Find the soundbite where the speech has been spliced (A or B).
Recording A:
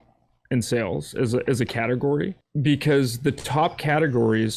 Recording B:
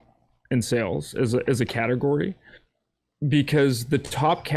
A